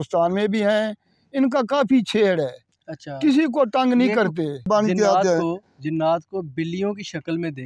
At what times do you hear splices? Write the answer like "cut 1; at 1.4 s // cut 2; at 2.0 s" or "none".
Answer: cut 1; at 4.7 s